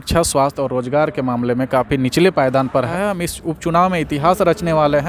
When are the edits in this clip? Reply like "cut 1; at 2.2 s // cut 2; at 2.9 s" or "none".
cut 1; at 2.9 s